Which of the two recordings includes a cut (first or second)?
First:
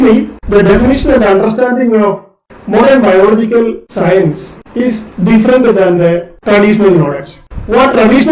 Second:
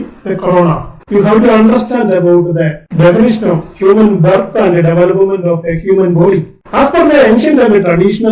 second